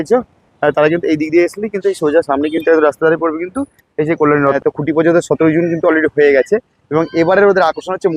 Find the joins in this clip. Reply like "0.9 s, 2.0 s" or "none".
4.6 s